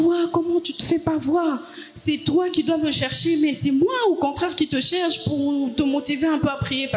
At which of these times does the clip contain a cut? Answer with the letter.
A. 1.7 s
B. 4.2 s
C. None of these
C